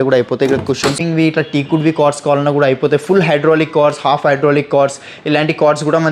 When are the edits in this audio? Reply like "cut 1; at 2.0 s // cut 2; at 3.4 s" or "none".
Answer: cut 1; at 0.9 s